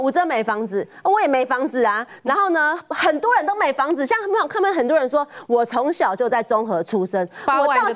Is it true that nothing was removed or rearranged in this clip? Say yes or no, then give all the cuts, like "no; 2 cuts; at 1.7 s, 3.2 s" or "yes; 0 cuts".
yes; 0 cuts